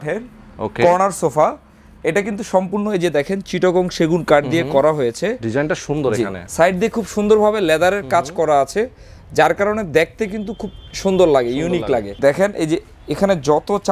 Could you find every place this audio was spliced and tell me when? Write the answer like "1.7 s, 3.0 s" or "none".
6.4 s, 12.2 s